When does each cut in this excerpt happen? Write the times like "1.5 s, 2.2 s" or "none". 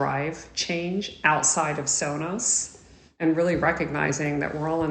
3.1 s